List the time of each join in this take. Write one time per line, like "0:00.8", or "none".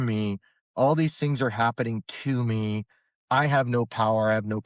none